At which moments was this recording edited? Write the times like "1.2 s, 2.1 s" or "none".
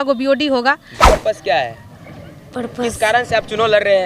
1.1 s